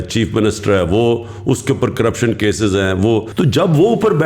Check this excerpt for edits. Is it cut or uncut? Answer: cut